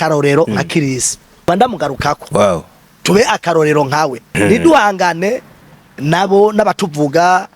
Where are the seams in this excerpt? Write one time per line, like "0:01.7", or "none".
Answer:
0:01.5
0:04.3